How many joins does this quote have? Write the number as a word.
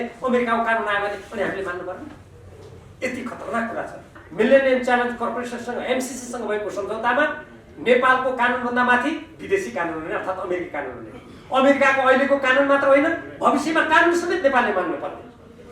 one